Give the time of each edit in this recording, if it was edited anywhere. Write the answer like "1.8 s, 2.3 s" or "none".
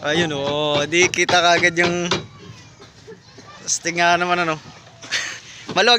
none